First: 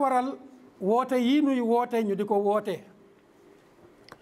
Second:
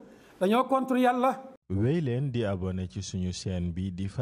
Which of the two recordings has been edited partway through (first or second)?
second